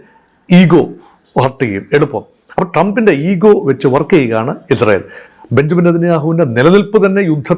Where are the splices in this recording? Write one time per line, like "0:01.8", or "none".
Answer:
none